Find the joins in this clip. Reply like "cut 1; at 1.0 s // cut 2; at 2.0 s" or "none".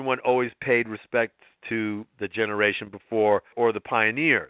cut 1; at 3.5 s

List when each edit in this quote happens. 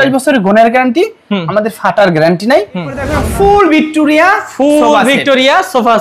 cut 1; at 3.1 s

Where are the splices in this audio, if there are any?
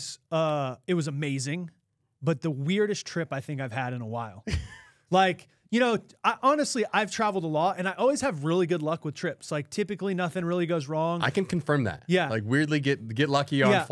none

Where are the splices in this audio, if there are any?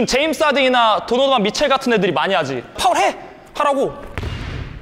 cut 1; at 2.8 s

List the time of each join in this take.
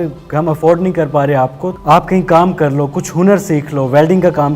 cut 1; at 1.7 s

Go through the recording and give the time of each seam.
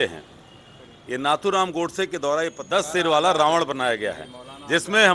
cut 1; at 2.6 s

